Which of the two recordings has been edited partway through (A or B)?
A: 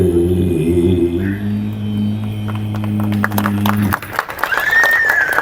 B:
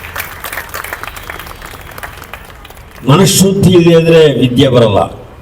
A